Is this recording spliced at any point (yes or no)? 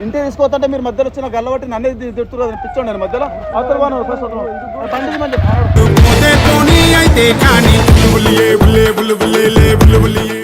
no